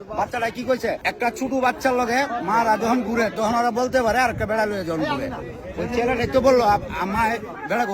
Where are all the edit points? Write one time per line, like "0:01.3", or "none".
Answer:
0:01.0